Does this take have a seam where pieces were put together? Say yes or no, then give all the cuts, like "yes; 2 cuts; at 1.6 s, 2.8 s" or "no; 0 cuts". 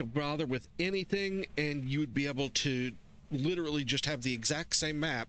no; 0 cuts